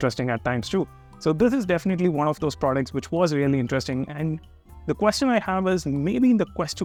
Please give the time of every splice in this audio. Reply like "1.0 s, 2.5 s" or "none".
none

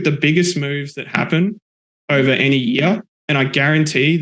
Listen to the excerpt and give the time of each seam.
none

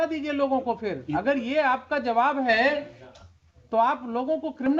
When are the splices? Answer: none

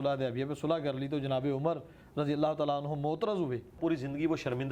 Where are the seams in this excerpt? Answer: 3.8 s

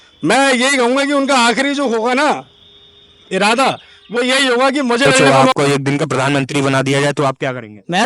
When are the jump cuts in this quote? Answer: 5.4 s

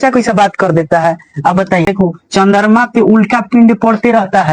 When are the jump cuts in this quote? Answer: 1.9 s

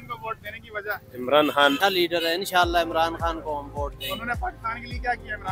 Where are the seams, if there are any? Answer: 1.8 s

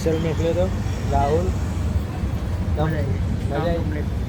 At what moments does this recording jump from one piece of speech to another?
none

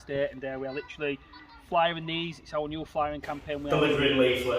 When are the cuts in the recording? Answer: 3.6 s

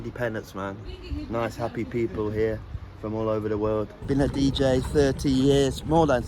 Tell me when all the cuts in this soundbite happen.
0.9 s, 4.0 s

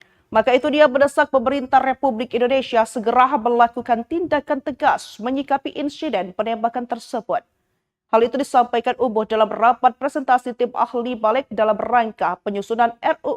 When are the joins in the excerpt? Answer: 10.0 s

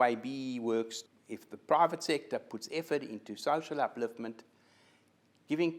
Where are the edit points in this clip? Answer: 1.0 s

